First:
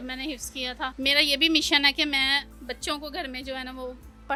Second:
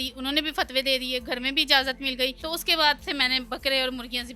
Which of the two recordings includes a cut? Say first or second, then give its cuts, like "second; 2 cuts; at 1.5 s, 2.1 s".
second; 1 cut; at 2.4 s